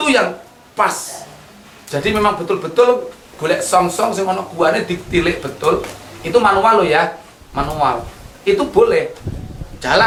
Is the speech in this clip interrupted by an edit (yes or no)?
no